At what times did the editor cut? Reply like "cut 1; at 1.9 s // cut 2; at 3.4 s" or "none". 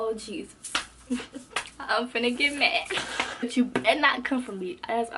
cut 1; at 3.4 s